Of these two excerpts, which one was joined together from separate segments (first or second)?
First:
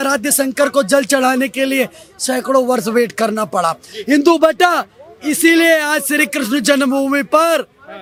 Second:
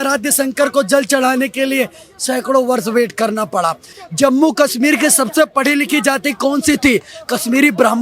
second